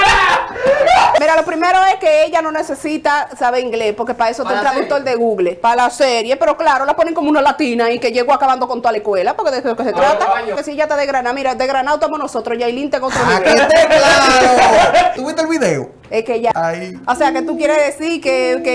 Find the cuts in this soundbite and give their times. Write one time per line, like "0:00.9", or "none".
0:01.2
0:05.6
0:10.6
0:15.2
0:16.5

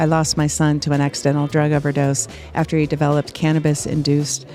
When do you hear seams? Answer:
none

